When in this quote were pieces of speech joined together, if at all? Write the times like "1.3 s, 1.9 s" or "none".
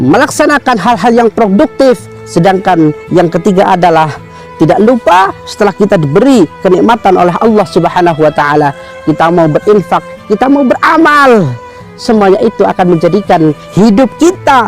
11.9 s